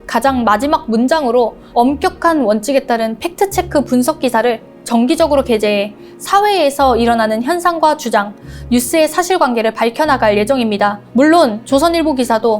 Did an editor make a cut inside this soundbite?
yes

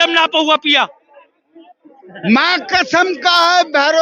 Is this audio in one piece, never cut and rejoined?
yes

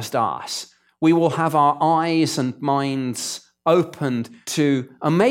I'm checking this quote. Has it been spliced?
yes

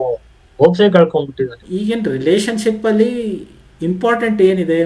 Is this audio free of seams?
no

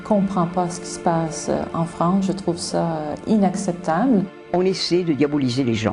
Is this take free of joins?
no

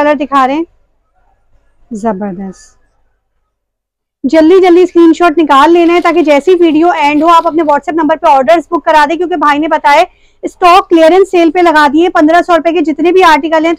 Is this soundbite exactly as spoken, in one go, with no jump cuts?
yes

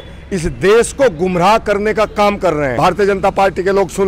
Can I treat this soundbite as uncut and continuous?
no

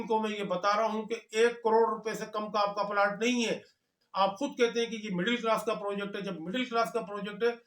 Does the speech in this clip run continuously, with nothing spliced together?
no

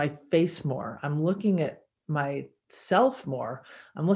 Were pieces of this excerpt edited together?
no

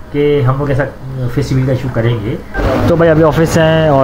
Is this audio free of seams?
no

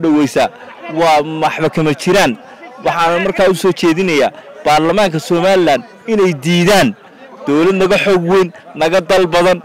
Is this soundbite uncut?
yes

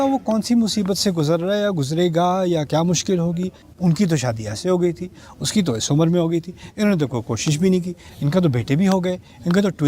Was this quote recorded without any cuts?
no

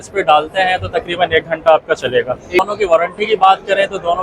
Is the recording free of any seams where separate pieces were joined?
no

